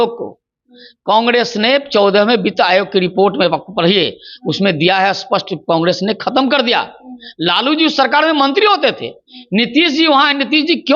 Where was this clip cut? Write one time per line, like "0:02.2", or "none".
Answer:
none